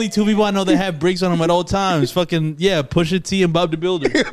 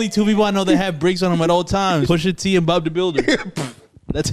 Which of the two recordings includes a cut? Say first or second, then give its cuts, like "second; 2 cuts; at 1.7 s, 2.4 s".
second; 1 cut; at 2.0 s